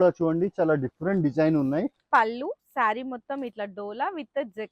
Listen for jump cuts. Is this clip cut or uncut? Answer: cut